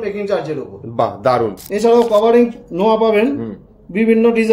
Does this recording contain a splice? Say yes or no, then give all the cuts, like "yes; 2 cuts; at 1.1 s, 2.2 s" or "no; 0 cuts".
yes; 1 cut; at 1.6 s